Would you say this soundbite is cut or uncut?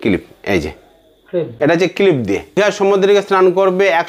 cut